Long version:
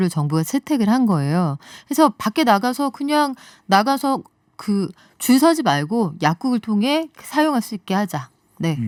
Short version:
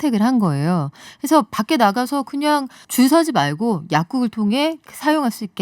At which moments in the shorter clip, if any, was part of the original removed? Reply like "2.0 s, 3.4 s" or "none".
2.8 s